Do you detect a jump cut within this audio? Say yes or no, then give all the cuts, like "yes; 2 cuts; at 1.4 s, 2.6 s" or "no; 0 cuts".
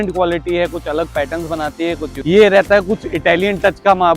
yes; 1 cut; at 2.1 s